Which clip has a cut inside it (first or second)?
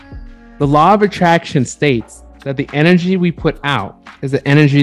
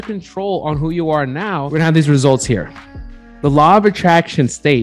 second